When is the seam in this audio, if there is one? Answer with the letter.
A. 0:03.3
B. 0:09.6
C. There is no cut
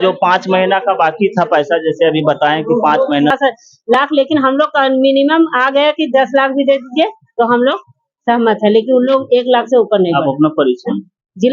A